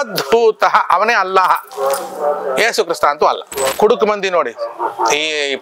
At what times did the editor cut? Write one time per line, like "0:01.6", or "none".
0:03.7